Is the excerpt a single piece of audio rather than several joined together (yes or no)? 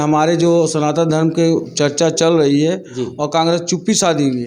yes